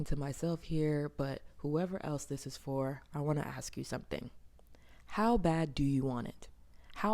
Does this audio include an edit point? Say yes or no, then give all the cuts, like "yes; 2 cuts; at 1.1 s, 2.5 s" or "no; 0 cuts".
no; 0 cuts